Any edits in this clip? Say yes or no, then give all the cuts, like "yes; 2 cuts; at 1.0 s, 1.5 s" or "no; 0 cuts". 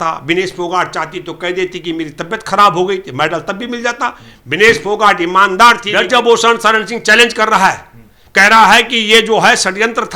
yes; 1 cut; at 5.8 s